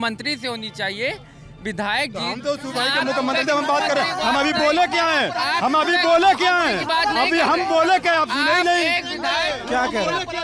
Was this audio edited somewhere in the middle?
no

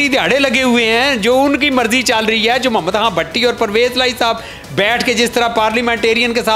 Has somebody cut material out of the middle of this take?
no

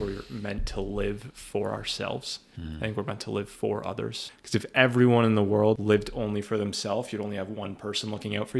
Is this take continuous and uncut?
no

